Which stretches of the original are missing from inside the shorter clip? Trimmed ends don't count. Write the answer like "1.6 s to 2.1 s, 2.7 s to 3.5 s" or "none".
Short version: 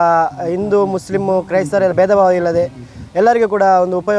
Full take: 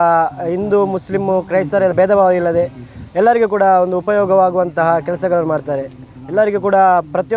none